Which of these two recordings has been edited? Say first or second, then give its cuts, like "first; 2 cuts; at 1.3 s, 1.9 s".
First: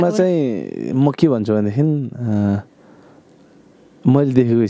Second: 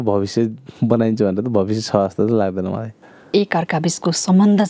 second; 1 cut; at 3.3 s